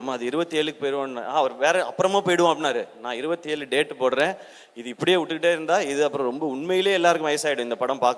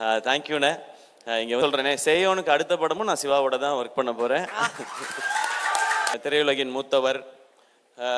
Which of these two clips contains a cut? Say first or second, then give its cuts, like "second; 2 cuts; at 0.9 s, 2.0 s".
second; 2 cuts; at 1.6 s, 6.2 s